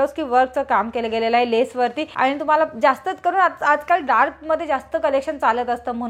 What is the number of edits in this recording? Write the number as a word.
one